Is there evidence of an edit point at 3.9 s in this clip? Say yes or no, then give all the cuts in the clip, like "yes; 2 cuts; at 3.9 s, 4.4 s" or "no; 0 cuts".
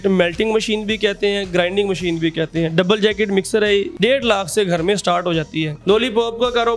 yes; 2 cuts; at 3.9 s, 5.7 s